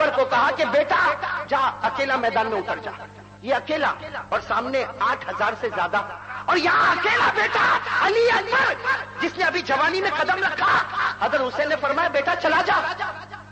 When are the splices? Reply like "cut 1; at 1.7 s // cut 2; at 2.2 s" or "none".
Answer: cut 1; at 6.3 s